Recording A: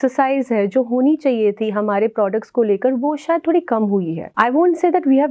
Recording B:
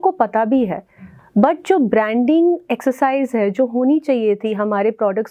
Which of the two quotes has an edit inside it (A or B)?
A